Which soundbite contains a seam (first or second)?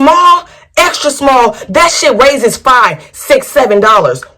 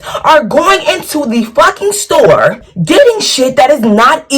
second